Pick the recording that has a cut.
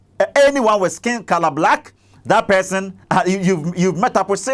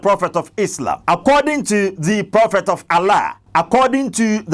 second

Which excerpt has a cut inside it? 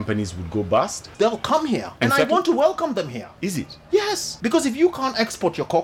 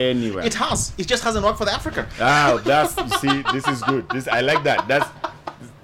first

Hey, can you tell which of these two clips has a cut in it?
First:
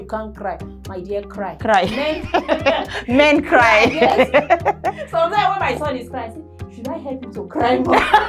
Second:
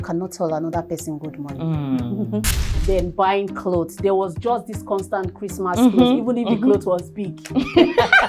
second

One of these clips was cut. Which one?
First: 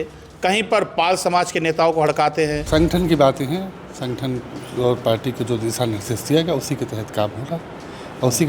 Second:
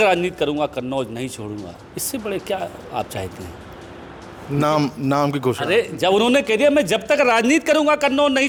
first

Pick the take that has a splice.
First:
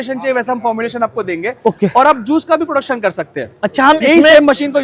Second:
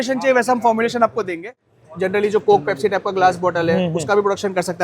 second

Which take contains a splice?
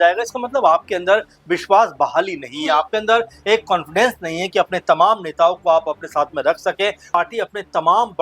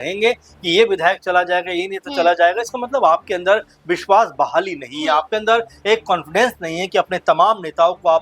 first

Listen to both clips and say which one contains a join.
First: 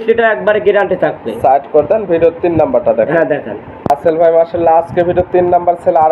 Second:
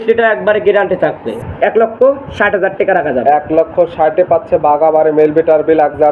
second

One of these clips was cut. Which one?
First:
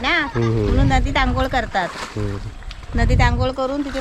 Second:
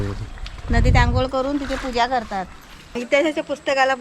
second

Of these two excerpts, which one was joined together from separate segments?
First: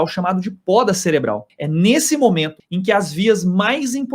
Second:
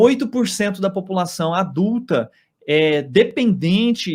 first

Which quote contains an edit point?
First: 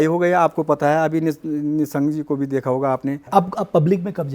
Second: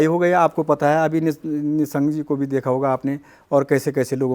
first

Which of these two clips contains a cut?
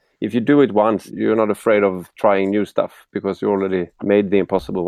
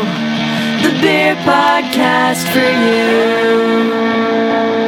first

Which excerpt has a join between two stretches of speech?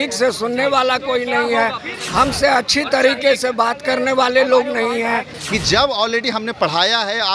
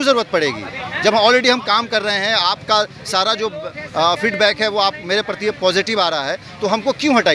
first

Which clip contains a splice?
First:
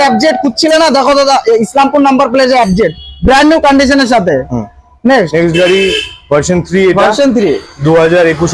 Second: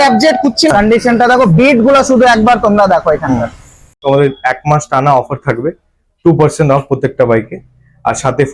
second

